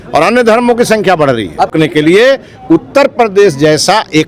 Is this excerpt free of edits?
yes; 0 cuts

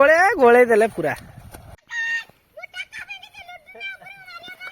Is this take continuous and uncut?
no; 1 cut; at 1.7 s

